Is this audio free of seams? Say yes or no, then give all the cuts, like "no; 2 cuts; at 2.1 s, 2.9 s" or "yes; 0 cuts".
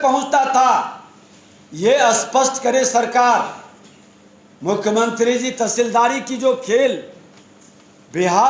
yes; 0 cuts